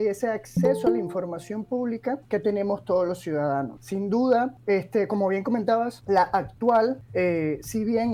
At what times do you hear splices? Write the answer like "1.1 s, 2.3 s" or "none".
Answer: 2.2 s, 3.8 s, 4.6 s, 6.0 s, 7.0 s